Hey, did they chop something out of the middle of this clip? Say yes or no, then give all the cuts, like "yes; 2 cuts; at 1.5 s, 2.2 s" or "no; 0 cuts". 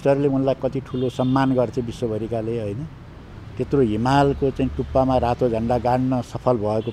no; 0 cuts